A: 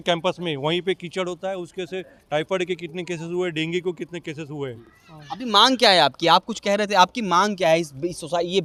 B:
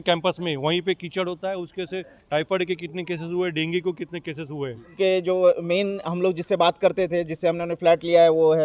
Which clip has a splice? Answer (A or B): B